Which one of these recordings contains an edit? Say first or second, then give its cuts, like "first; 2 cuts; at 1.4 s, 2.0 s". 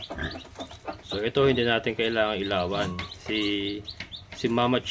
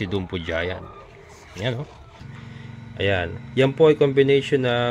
second; 1 cut; at 2.3 s